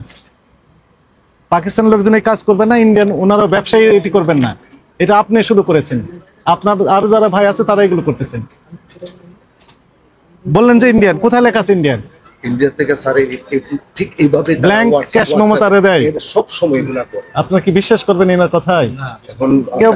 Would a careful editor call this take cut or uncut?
uncut